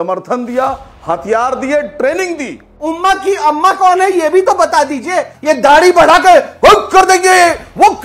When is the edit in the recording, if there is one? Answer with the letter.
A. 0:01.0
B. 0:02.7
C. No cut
B